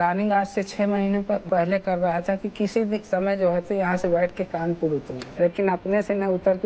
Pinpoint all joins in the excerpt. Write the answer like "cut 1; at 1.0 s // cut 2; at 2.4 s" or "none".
cut 1; at 1.4 s // cut 2; at 5.2 s